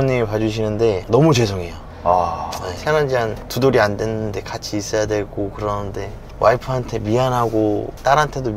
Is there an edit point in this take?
no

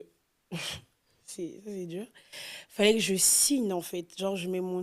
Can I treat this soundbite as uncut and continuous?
yes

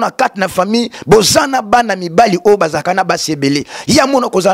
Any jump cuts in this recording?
no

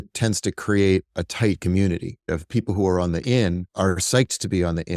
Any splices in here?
no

